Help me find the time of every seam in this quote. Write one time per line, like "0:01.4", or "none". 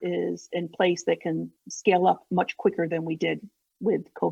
none